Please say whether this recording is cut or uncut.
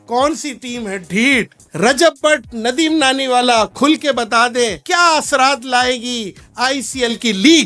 cut